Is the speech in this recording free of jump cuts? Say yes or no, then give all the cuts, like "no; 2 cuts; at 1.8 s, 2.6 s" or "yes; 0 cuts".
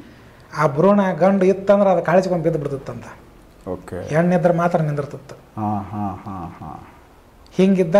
yes; 0 cuts